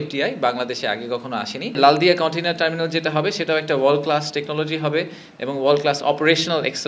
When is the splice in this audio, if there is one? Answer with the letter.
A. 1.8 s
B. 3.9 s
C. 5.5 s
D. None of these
A